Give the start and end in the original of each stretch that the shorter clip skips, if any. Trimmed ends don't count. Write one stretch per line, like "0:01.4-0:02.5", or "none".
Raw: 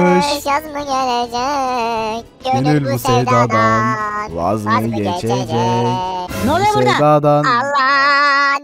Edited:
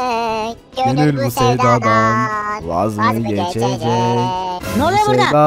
none